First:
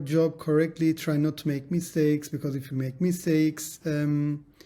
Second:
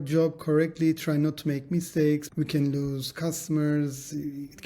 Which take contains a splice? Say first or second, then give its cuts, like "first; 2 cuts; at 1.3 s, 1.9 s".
second; 1 cut; at 2.3 s